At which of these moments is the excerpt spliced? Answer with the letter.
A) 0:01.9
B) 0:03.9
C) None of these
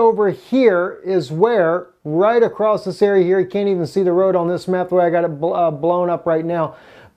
A